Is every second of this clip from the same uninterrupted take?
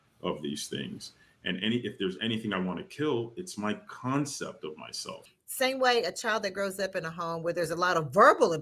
no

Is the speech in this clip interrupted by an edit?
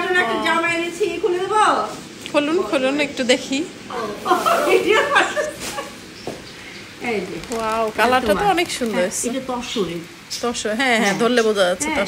no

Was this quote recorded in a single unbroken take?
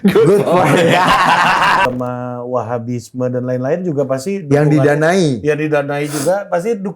no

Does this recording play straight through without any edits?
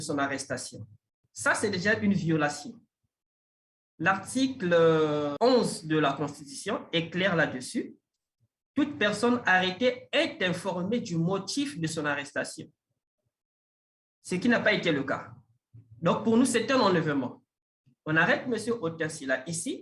no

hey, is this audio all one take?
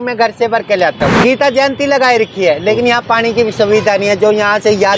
no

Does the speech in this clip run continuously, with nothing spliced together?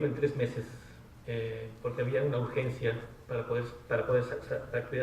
no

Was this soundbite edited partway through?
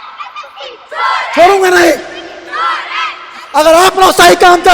no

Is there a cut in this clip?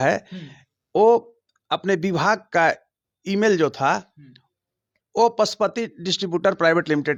no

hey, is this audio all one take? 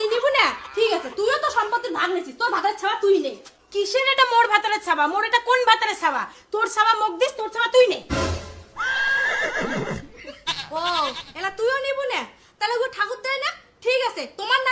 no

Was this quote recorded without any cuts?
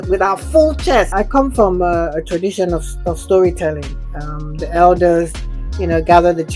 no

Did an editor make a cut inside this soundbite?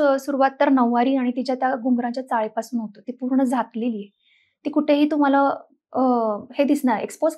no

